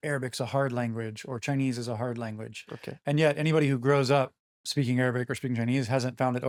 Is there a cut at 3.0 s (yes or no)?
no